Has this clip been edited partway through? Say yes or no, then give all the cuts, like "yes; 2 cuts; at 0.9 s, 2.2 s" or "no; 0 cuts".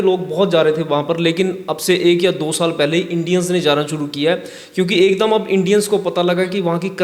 no; 0 cuts